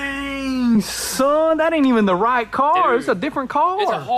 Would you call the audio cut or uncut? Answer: uncut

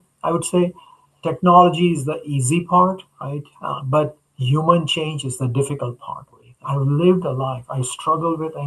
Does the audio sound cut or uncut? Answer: cut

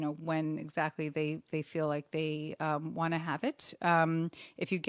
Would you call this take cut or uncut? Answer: uncut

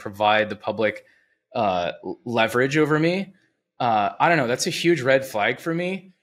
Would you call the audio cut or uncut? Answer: uncut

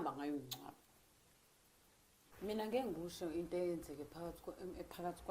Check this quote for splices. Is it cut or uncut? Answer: cut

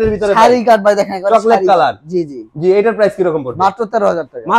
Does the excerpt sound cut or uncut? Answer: uncut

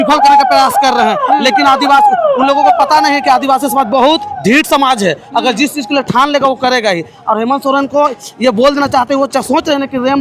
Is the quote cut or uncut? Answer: uncut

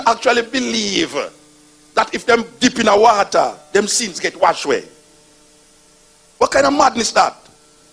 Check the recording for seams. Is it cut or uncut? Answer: uncut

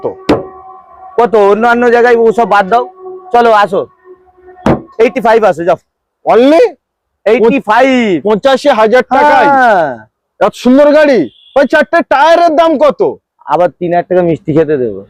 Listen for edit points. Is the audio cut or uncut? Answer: uncut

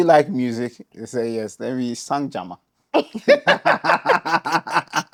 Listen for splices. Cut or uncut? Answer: uncut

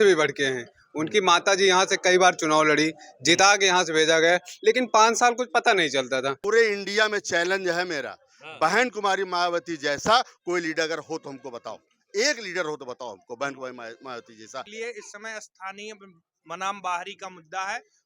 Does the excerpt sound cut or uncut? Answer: cut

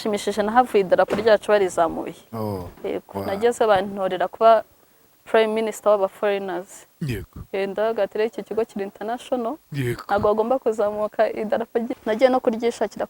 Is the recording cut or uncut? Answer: cut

